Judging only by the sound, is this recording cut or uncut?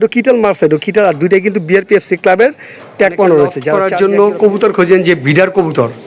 cut